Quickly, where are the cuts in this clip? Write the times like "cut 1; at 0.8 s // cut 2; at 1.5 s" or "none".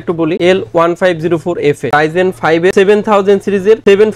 cut 1; at 1.9 s